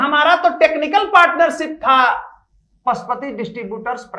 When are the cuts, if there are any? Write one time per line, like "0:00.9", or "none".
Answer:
none